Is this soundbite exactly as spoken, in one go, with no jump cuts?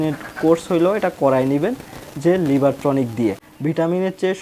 no; 1 cut; at 3.5 s

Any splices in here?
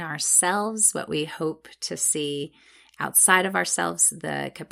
no; 0 cuts

